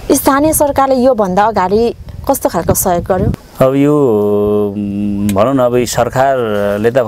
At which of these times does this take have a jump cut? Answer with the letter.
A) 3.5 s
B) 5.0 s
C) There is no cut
A